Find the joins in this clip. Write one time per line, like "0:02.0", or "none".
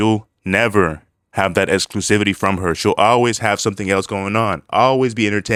none